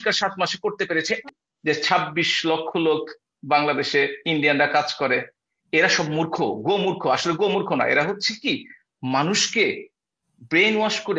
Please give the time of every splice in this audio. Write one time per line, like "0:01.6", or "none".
0:01.2